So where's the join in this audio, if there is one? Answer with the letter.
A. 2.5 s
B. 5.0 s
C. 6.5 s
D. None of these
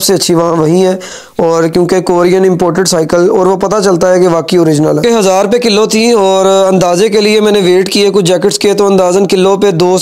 B